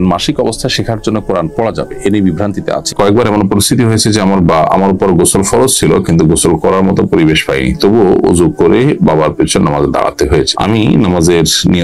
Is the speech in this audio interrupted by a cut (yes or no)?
yes